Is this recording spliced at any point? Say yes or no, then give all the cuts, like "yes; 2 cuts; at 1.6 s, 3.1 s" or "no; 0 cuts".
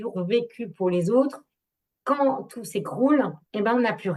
no; 0 cuts